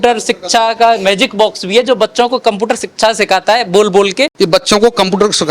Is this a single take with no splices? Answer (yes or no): no